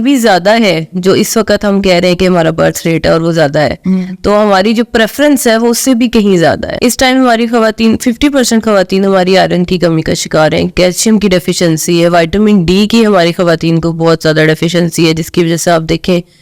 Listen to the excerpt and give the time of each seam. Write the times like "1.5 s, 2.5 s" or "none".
6.7 s